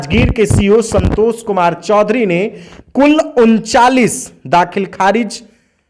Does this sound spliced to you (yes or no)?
no